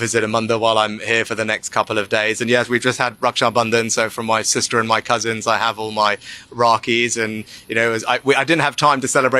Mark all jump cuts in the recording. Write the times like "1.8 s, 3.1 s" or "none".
none